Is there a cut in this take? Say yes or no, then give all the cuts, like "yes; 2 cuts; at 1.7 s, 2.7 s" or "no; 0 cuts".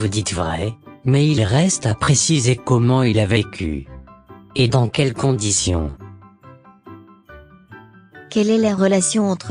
no; 0 cuts